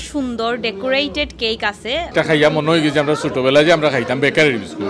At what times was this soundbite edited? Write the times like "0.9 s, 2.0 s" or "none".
2.1 s

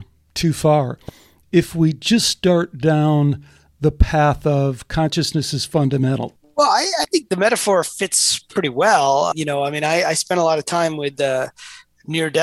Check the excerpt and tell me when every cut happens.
6.3 s, 9.3 s

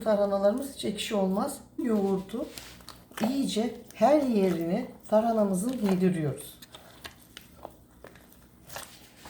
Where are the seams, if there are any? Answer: 1.8 s

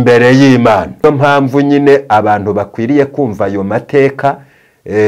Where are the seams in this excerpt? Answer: 1.0 s

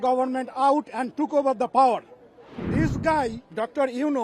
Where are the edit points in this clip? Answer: 2.7 s

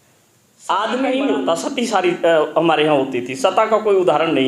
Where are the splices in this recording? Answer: 1.2 s

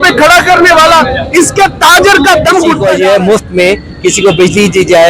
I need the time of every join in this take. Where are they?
2.8 s

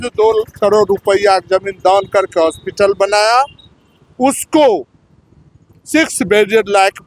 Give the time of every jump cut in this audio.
none

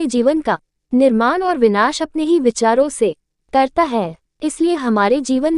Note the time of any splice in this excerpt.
3.3 s

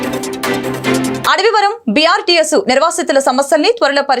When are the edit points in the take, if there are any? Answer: 1.2 s

